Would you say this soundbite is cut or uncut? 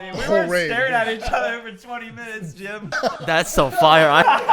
cut